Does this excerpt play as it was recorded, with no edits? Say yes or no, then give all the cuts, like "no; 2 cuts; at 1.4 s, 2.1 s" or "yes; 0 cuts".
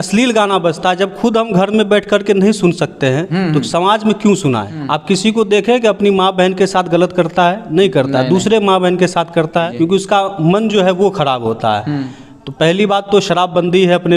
no; 2 cuts; at 4.7 s, 9.7 s